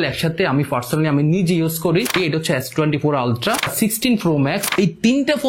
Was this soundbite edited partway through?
yes; 3 cuts; at 2.2 s, 3.7 s, 4.7 s

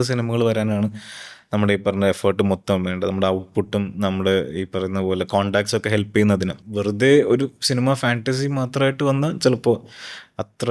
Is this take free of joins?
no; 1 cut; at 6.6 s

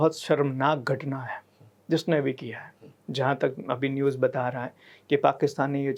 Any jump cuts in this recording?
no; 0 cuts

